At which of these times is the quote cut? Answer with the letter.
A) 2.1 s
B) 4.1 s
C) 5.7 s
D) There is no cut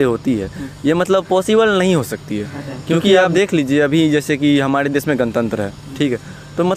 D